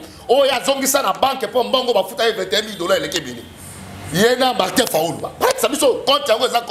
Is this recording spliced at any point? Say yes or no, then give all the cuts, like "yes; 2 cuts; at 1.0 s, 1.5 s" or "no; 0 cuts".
no; 0 cuts